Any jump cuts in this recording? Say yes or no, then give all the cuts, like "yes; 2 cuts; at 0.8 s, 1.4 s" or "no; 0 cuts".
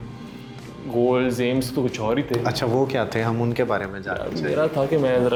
no; 0 cuts